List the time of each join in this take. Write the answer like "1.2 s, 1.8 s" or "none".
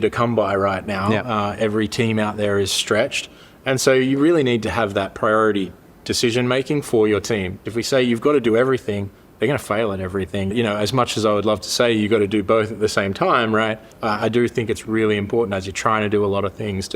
7.6 s, 10.5 s, 13.9 s